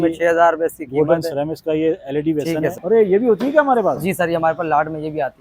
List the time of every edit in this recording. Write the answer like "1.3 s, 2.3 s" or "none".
2.8 s